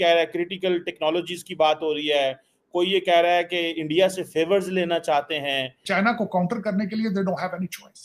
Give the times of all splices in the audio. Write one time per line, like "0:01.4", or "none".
0:05.8